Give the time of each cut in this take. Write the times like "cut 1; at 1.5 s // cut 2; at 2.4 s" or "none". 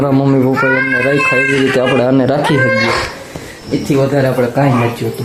none